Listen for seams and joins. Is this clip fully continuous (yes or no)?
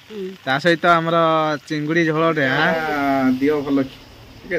no